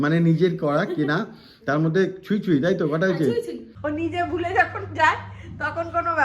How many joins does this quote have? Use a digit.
1